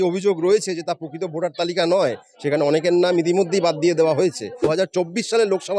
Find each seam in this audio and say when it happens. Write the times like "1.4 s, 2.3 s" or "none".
4.6 s